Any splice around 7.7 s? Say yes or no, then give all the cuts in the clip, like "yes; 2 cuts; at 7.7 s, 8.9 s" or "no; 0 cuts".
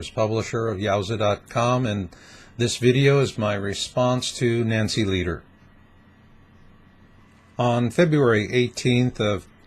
yes; 1 cut; at 7.7 s